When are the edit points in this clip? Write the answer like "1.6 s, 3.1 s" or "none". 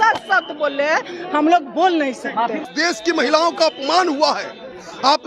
2.7 s